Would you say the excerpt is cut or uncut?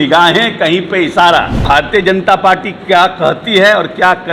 cut